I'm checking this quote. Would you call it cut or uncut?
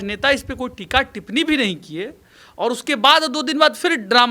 uncut